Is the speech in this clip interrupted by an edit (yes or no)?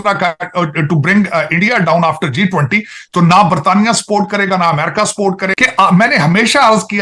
yes